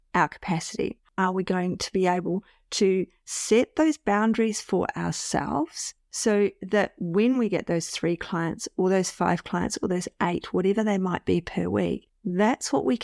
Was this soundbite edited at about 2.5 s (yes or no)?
no